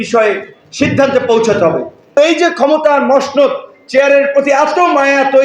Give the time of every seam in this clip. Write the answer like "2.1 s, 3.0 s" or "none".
2.2 s